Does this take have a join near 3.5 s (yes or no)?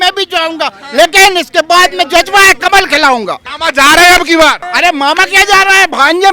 yes